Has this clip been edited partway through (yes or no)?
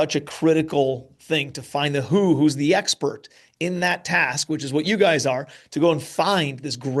no